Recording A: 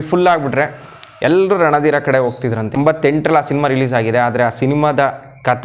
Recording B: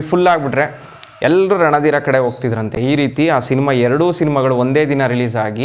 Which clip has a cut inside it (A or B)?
A